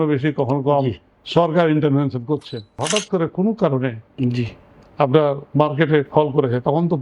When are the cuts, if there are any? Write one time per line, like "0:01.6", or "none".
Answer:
0:02.8